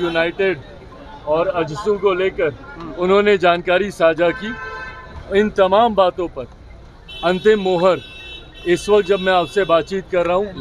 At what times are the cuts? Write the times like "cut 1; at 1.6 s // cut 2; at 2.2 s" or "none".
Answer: none